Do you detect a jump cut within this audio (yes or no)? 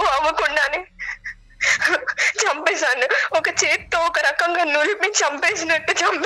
no